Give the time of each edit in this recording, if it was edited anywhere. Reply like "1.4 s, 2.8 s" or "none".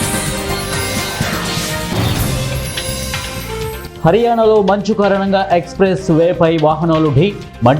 3.9 s